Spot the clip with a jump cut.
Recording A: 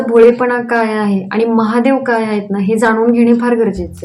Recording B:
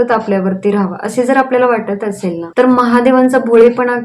B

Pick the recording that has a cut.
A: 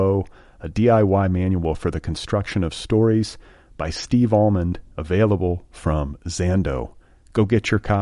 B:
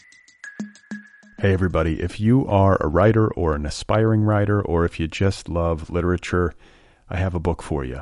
B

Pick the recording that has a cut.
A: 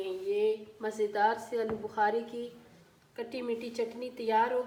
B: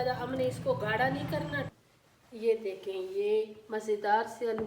B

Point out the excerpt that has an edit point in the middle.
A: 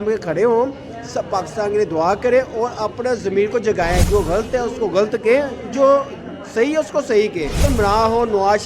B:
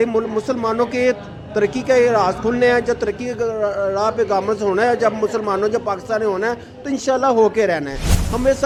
A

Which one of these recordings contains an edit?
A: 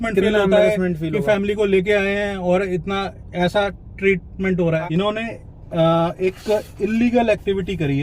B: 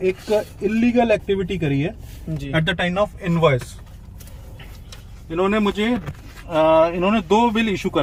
A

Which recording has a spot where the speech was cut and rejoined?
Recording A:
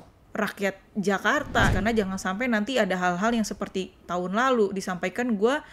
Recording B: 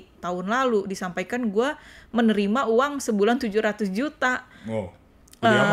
A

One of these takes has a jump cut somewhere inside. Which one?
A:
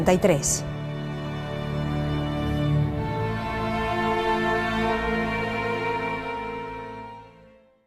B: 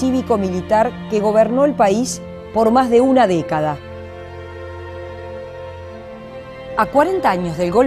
A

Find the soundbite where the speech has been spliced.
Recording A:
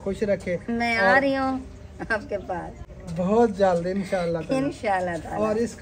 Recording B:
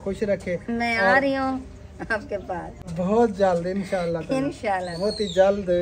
B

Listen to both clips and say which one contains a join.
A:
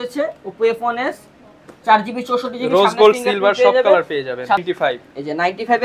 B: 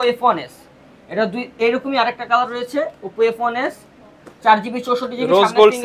A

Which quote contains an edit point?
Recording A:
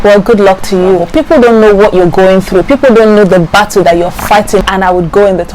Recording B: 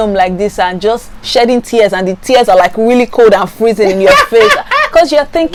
A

